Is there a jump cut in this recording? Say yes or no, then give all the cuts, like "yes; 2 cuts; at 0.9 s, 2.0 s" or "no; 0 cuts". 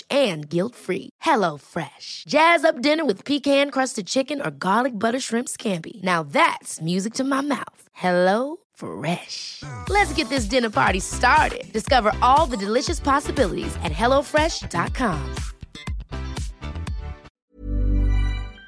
yes; 1 cut; at 17.3 s